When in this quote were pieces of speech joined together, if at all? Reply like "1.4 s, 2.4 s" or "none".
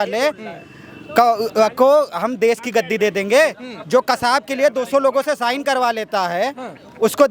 none